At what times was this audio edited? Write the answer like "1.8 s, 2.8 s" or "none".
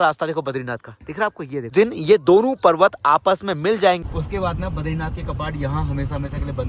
1.7 s, 4.0 s